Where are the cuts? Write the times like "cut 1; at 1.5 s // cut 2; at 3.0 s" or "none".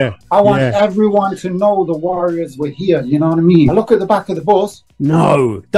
cut 1; at 3.7 s